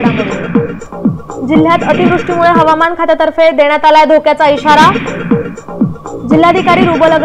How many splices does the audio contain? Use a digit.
1